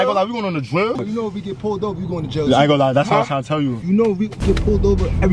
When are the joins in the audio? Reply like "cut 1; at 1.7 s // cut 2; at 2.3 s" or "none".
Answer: cut 1; at 1.0 s